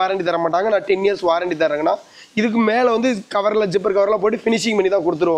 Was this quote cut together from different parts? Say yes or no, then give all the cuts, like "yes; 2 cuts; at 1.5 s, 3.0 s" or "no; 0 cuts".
no; 0 cuts